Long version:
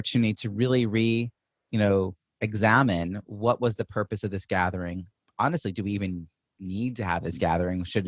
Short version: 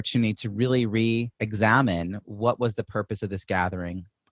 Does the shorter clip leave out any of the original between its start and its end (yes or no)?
yes